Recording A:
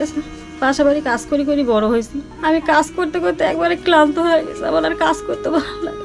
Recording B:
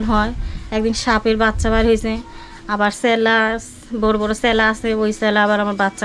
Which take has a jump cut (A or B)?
A